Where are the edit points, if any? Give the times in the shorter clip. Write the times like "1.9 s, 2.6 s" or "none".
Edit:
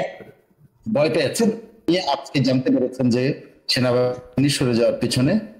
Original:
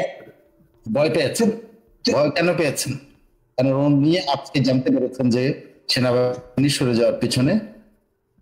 1.9 s